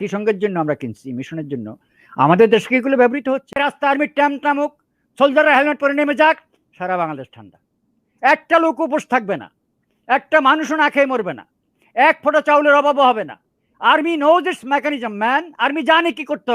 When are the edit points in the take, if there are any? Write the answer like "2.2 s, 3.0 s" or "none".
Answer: 3.5 s